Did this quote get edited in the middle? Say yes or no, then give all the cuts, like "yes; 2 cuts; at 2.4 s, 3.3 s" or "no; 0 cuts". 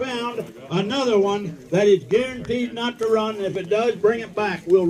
no; 0 cuts